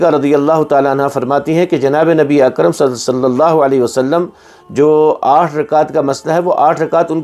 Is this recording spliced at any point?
no; 0 cuts

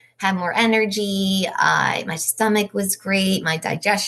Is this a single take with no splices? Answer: yes; 0 cuts

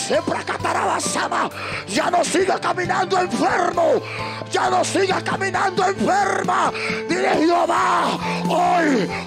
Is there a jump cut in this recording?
no; 0 cuts

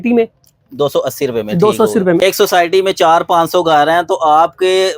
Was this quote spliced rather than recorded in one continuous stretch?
yes; 1 cut; at 2.2 s

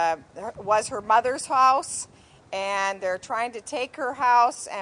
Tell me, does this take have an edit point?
no; 0 cuts

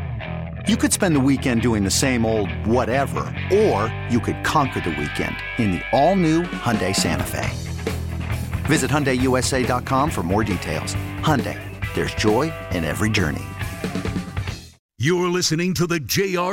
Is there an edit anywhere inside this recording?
yes; 1 cut; at 14.7 s

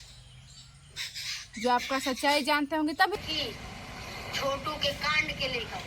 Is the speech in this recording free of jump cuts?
no; 1 cut; at 3.1 s

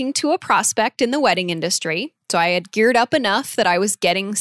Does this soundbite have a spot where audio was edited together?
no; 0 cuts

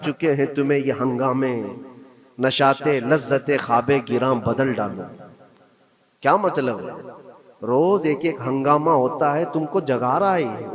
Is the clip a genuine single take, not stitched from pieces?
yes; 0 cuts

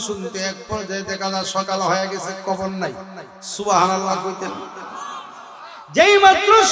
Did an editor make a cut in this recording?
no; 0 cuts

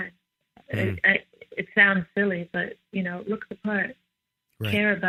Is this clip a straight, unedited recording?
yes; 0 cuts

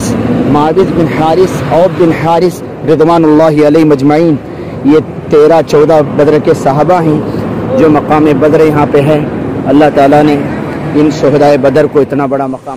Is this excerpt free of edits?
yes; 0 cuts

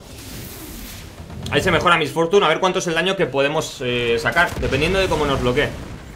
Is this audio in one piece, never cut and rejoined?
yes; 0 cuts

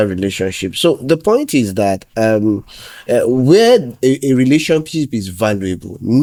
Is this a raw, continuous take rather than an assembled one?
yes; 0 cuts

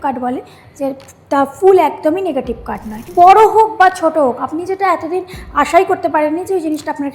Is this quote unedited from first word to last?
no; 1 cut; at 3.1 s

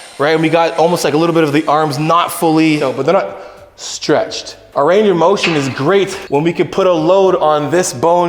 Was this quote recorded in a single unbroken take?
no; 2 cuts; at 2.9 s, 4.6 s

